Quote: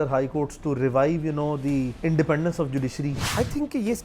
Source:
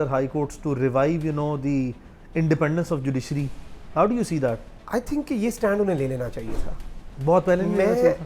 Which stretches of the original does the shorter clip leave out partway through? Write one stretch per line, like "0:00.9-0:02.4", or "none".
0:01.9-0:02.3
0:03.5-0:04.8